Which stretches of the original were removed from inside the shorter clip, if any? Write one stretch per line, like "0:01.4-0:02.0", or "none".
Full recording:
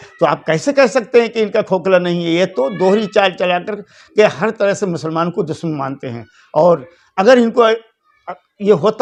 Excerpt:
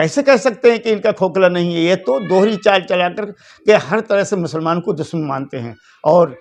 none